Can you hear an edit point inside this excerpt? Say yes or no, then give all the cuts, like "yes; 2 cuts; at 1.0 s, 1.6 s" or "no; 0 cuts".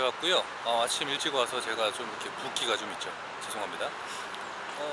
no; 0 cuts